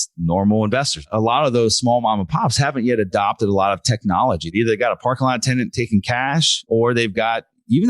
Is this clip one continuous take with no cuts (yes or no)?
no